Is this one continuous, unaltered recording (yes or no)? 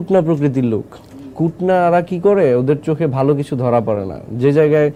yes